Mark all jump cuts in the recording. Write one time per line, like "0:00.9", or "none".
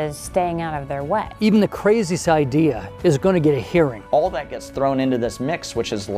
0:01.3
0:04.0